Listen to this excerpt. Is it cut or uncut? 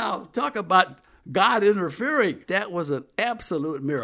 cut